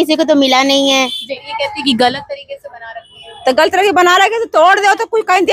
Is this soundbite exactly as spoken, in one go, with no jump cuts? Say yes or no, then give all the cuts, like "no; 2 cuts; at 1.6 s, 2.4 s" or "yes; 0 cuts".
no; 1 cut; at 1.5 s